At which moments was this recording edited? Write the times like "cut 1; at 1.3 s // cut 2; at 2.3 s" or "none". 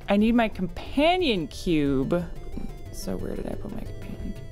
cut 1; at 2.5 s